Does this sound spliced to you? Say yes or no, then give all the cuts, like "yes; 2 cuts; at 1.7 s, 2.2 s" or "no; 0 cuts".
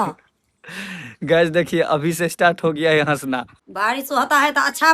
yes; 1 cut; at 3.6 s